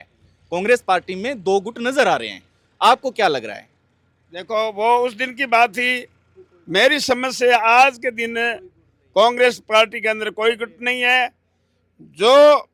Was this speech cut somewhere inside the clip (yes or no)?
no